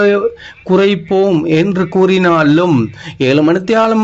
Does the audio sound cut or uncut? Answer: uncut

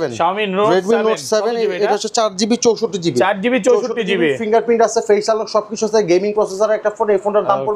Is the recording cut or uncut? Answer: uncut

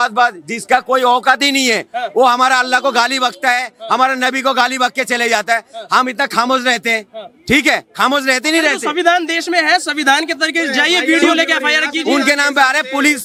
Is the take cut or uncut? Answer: uncut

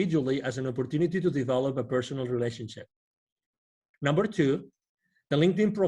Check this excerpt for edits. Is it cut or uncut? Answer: cut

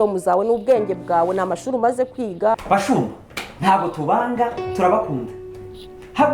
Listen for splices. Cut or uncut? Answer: cut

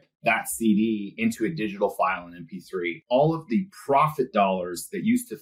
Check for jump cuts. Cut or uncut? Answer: cut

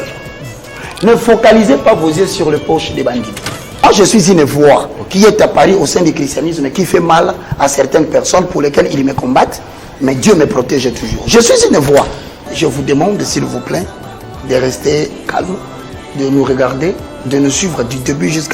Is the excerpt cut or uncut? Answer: cut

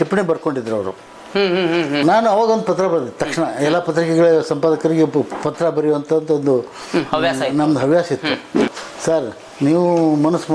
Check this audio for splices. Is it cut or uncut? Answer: cut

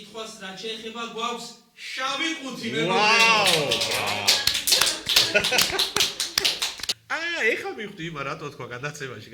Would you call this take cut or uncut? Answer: cut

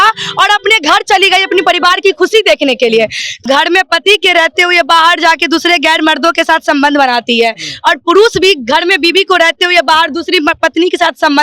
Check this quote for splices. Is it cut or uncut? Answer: cut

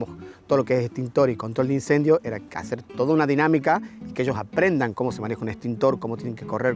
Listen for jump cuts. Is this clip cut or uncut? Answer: uncut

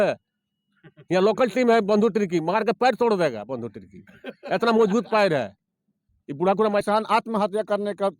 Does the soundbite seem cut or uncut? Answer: cut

